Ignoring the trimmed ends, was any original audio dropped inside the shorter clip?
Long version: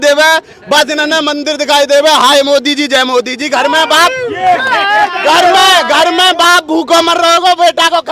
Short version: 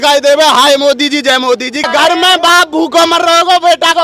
yes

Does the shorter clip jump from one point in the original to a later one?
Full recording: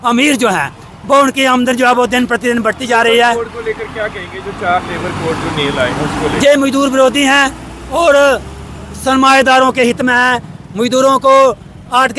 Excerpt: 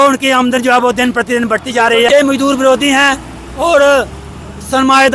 yes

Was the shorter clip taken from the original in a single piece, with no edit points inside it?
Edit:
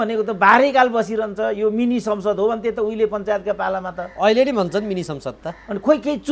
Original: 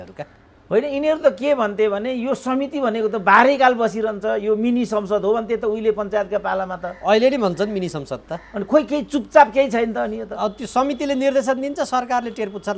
yes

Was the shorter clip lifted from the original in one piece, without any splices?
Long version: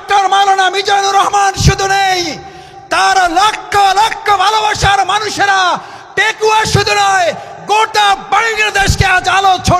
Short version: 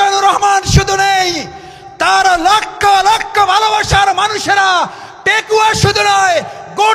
yes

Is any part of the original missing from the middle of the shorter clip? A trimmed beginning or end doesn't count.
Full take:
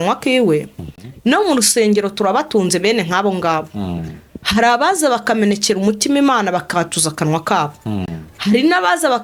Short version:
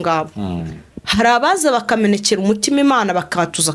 no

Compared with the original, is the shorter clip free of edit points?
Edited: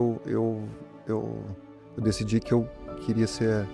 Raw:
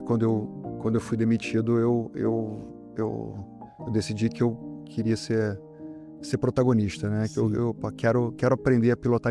yes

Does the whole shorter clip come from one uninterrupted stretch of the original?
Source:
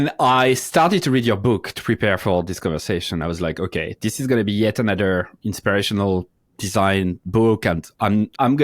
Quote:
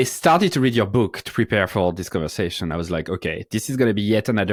yes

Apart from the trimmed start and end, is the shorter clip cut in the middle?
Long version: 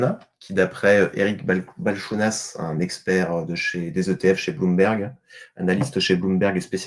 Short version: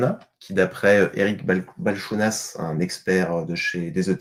no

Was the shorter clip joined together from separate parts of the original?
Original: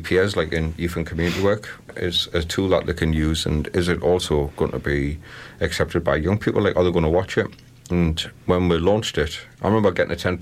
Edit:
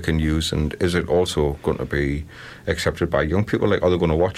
no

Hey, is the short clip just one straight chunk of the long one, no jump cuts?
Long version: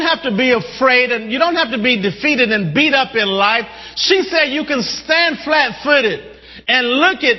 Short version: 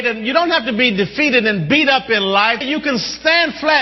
no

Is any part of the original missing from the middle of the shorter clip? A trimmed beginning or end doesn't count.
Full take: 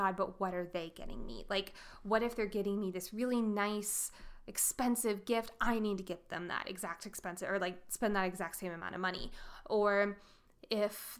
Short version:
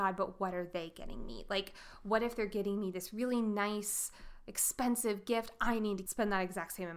yes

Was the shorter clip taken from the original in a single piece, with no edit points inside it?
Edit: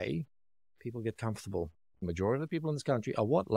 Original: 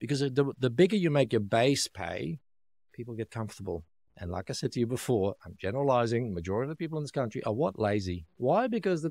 no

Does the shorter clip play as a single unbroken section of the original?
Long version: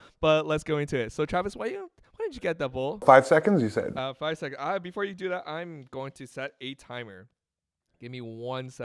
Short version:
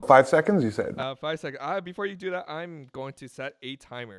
yes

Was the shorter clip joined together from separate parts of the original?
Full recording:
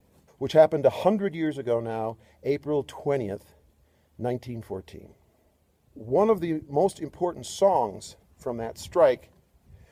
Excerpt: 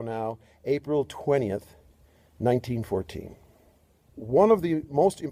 no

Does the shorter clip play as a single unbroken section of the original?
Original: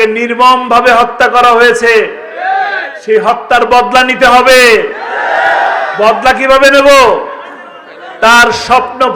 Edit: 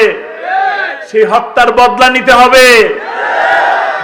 yes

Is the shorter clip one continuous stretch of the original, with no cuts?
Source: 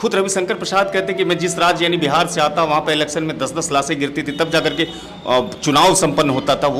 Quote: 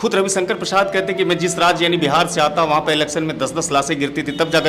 yes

